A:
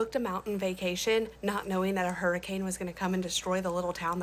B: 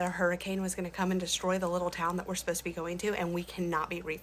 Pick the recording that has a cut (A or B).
B